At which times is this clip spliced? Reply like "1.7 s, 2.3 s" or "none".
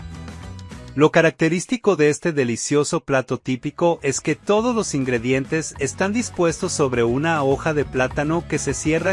0.9 s